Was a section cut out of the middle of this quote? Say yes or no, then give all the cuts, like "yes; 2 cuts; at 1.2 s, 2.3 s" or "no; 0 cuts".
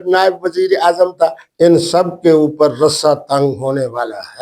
yes; 1 cut; at 1.4 s